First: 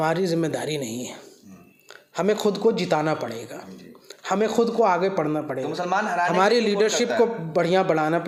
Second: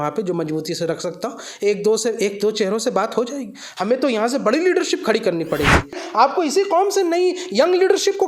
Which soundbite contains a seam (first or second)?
second